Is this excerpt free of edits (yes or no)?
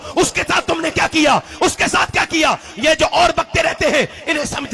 yes